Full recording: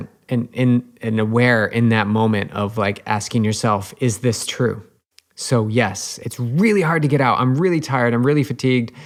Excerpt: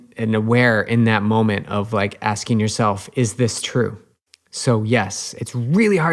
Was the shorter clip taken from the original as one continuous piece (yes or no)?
yes